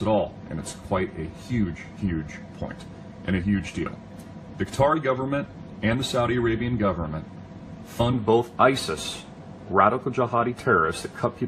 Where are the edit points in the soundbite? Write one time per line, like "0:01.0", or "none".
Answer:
none